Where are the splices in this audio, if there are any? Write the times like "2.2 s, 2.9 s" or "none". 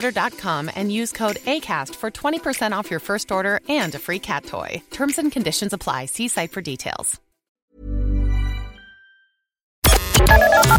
7.5 s, 9.8 s